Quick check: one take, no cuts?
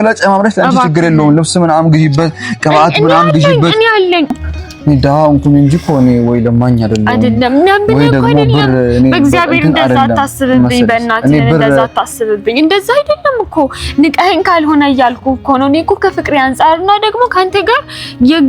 no; 1 cut; at 4.3 s

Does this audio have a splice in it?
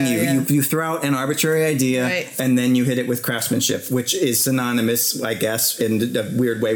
no; 0 cuts

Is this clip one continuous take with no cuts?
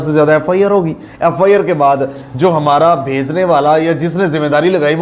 yes; 0 cuts

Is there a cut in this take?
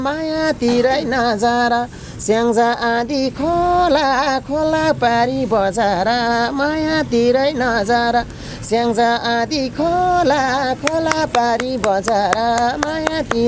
no; 0 cuts

